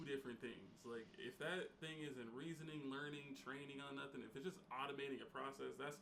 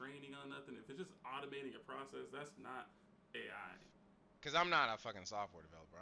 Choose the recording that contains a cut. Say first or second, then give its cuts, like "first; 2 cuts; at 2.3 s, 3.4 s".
second; 1 cut; at 3.9 s